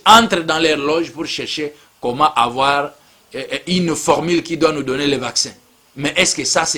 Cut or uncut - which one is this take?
uncut